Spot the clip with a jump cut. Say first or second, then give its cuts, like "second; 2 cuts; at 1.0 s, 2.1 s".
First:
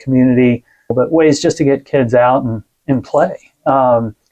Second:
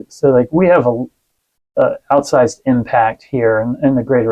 first; 1 cut; at 0.9 s